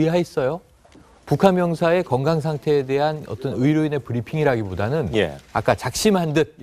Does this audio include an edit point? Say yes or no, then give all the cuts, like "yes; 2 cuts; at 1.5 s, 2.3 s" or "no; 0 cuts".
no; 0 cuts